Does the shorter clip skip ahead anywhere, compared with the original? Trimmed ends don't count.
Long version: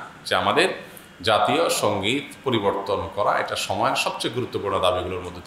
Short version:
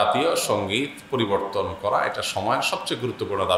no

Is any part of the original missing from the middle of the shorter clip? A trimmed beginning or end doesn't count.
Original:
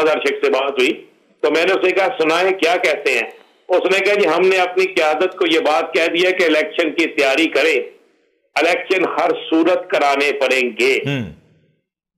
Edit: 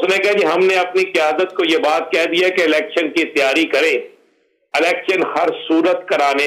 no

